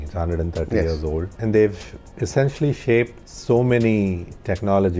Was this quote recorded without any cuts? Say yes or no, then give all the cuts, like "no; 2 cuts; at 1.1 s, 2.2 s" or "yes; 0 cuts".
no; 2 cuts; at 1.3 s, 3.3 s